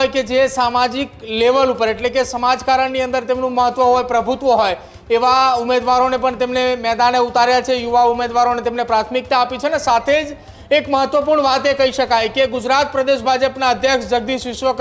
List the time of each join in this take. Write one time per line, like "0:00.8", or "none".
none